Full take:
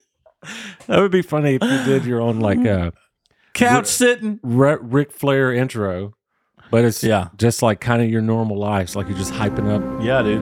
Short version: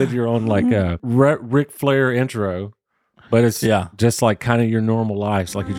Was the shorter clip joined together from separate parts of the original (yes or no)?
yes